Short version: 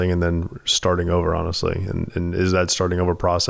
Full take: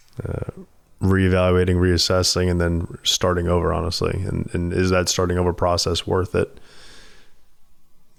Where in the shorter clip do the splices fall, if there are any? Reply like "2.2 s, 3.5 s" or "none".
none